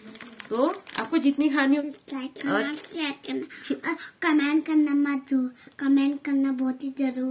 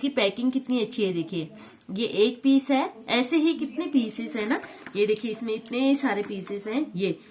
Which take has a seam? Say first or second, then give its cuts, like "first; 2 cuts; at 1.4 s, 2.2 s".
first; 1 cut; at 1.8 s